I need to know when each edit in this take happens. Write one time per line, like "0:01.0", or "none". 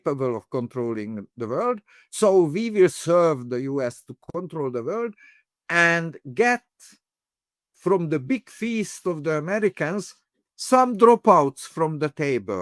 none